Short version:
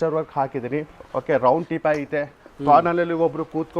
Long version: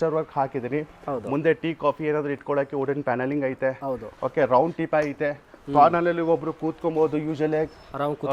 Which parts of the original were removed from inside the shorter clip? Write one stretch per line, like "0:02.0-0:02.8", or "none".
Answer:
0:01.0-0:04.1